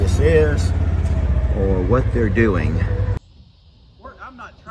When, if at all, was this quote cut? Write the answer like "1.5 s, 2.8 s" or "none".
3.2 s

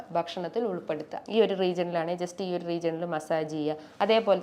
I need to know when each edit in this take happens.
1.1 s

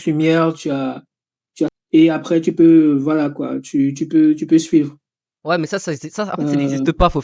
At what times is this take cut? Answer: 1.7 s

